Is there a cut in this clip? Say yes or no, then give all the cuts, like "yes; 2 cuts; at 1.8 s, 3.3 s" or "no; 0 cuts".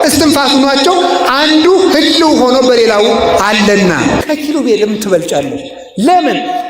yes; 1 cut; at 4.2 s